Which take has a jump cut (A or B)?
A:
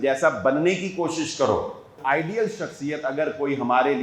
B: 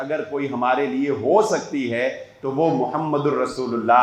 A